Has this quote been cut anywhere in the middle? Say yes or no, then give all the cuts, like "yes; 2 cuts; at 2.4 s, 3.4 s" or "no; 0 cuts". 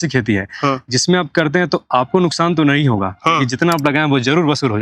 no; 0 cuts